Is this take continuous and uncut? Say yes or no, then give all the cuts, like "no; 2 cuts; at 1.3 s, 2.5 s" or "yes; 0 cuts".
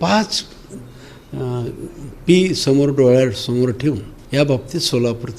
no; 1 cut; at 4.1 s